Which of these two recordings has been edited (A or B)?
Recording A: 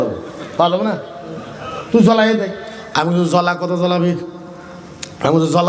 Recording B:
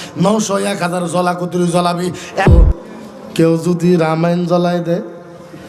B